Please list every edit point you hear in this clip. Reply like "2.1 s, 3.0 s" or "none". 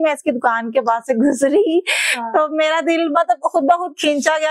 none